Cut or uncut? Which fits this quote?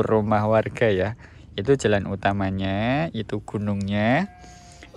uncut